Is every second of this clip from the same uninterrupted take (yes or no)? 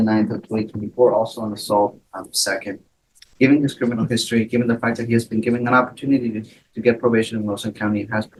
yes